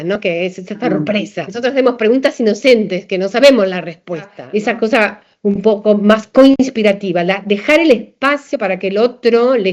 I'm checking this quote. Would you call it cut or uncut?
cut